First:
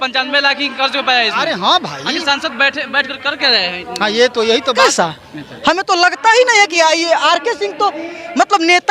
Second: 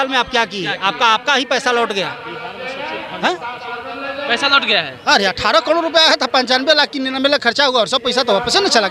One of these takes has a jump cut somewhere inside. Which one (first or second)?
first